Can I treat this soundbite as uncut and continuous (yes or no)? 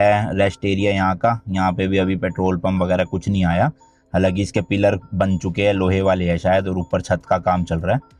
yes